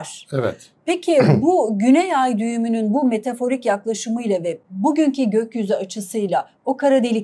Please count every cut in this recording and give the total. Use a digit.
0